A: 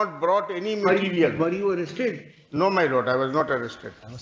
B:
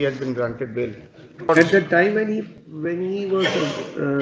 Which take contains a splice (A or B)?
B